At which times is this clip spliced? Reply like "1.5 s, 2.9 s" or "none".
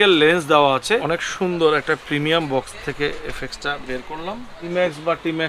1.0 s, 4.6 s